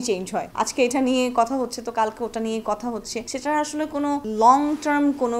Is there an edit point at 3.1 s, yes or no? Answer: no